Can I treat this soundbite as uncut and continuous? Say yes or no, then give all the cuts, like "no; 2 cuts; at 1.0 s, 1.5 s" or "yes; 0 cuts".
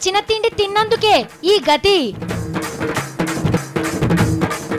no; 1 cut; at 3.6 s